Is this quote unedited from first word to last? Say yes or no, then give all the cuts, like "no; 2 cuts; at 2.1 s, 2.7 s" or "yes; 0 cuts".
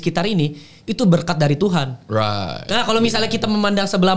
yes; 0 cuts